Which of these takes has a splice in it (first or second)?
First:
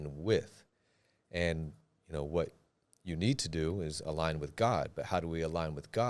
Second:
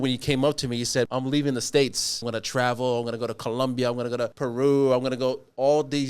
second